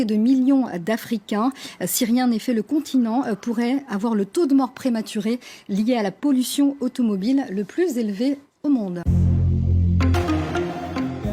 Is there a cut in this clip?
yes; 1 cut; at 9.0 s

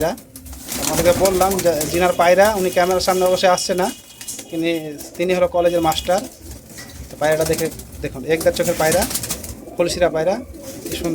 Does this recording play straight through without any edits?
yes; 0 cuts

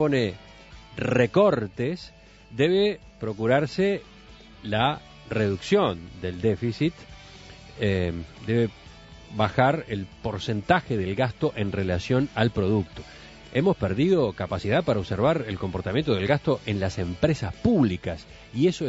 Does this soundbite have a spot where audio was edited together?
yes; 1 cut; at 9.9 s

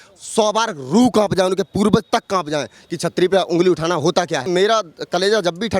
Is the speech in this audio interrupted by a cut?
yes; 1 cut; at 4.5 s

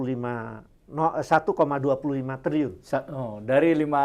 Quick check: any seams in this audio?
no; 0 cuts

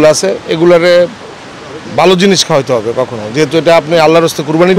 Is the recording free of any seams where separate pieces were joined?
yes; 0 cuts

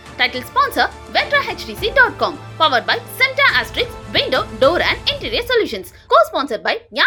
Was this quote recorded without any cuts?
yes; 0 cuts

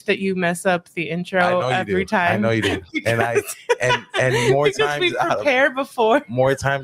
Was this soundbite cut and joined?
no; 0 cuts

